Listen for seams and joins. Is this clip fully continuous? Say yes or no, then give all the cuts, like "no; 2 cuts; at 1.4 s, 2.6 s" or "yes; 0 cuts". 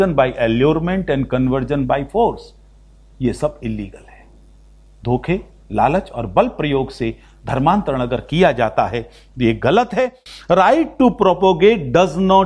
no; 1 cut; at 10.2 s